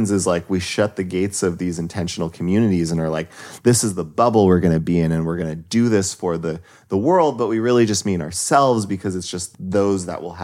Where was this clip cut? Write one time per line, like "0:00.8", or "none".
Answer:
0:09.4